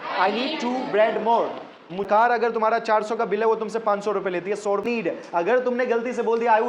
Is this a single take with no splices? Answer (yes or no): no